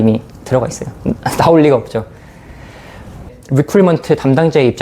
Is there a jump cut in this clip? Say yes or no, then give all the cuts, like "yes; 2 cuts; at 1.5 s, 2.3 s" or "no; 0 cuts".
yes; 1 cut; at 3.3 s